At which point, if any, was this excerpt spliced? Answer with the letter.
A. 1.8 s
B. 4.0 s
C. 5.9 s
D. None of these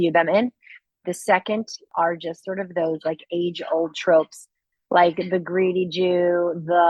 A